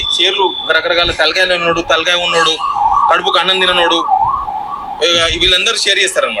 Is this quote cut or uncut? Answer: uncut